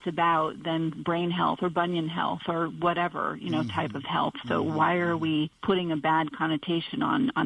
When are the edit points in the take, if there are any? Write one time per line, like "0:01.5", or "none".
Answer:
0:05.5